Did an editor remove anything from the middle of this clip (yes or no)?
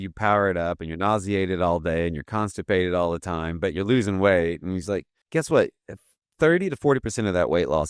yes